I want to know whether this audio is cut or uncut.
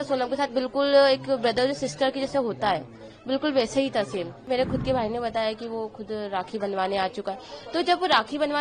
cut